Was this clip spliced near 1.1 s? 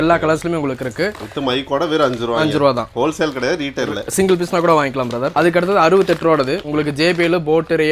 no; 0 cuts

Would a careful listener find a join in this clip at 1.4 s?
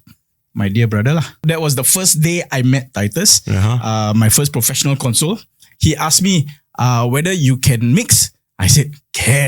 yes; 1 cut; at 1.4 s

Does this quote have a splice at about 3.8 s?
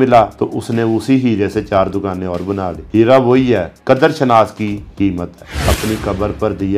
no; 1 cut; at 5.4 s

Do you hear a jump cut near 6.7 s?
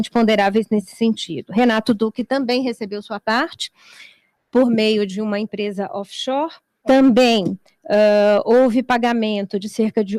yes; 1 cut; at 6.7 s

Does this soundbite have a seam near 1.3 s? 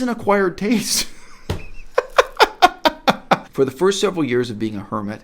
no; 1 cut; at 3.5 s

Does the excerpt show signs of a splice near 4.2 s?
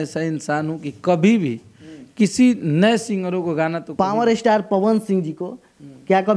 yes; 1 cut; at 4.2 s

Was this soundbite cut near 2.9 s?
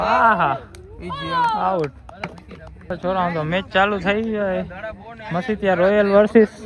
yes; 1 cut; at 2.9 s

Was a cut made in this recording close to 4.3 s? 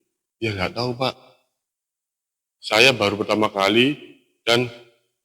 no; 0 cuts

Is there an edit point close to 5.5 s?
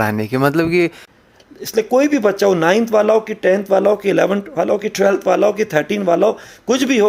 no; 1 cut; at 1.1 s

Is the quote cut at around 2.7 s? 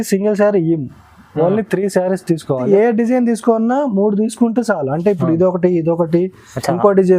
yes; 1 cut; at 2.7 s

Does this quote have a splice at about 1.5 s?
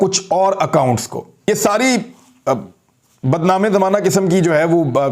yes; 1 cut; at 1.5 s

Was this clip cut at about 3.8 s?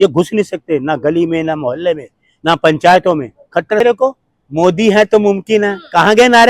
yes; 1 cut; at 3.8 s

